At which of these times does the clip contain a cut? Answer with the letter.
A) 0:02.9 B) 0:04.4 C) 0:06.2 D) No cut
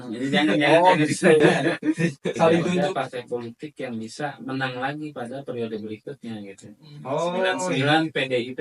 A